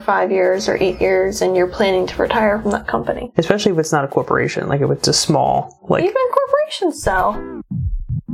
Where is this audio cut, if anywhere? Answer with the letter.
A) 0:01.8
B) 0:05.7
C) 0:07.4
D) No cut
C